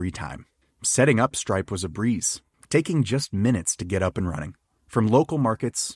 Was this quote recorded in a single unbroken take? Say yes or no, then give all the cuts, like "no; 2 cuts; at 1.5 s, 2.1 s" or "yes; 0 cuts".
yes; 0 cuts